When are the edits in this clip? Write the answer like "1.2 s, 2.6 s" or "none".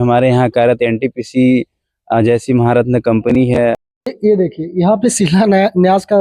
3.8 s

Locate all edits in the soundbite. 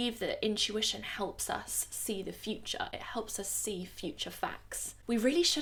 none

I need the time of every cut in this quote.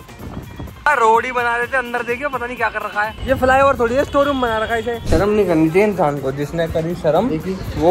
0.9 s, 3.2 s, 5.0 s

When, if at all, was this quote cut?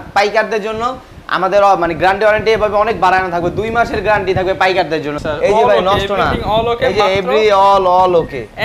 5.2 s

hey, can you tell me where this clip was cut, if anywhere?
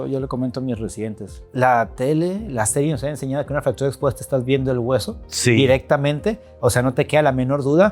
1.4 s

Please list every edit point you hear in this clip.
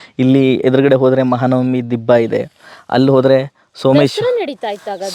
none

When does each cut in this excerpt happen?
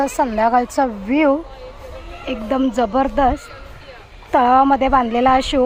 none

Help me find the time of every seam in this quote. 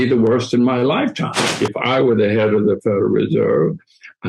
1.4 s

